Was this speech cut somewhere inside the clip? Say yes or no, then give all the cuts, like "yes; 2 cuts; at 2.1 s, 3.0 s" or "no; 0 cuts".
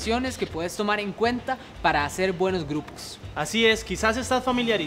no; 0 cuts